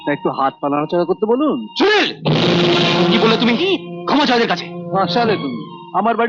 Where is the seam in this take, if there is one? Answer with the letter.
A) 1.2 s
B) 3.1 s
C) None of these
B